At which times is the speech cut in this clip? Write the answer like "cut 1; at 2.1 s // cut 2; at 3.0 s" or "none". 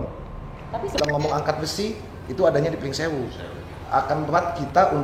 cut 1; at 0.9 s